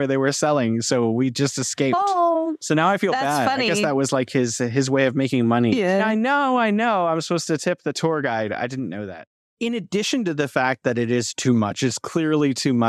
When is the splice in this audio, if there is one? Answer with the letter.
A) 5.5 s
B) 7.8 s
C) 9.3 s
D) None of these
C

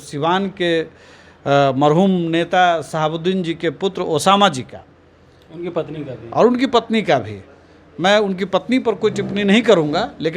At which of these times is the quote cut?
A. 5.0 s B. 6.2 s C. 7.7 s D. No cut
D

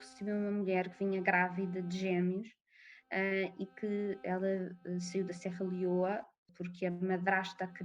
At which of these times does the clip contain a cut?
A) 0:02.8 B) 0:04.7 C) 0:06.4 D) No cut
C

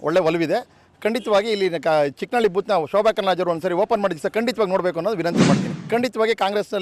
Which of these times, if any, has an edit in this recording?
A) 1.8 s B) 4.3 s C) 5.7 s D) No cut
C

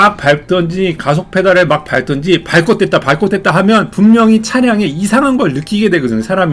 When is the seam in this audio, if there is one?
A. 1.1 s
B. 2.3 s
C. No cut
C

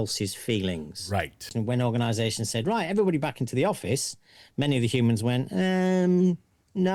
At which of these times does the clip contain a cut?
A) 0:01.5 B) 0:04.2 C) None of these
A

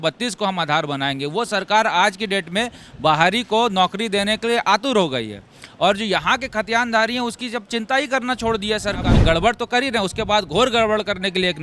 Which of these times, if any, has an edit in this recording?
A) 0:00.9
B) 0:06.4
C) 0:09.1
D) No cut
C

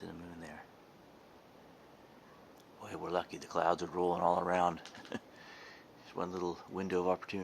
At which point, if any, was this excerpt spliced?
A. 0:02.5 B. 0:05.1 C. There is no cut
A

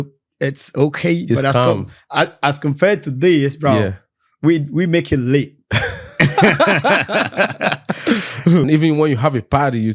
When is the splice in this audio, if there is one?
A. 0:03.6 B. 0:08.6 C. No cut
B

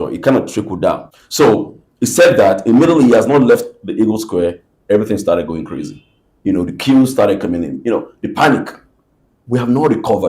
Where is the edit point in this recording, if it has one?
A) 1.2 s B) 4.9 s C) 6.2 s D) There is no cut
A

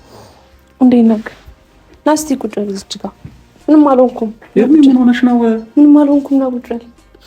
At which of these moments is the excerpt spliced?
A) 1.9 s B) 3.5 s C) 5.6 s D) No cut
A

